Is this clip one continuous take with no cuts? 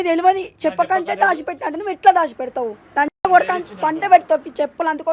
yes; 0 cuts

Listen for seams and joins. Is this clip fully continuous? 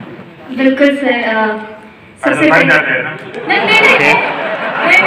yes; 0 cuts

